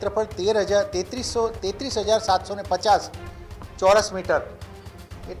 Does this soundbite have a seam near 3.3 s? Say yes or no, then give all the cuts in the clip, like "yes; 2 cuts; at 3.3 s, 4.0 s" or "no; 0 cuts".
no; 0 cuts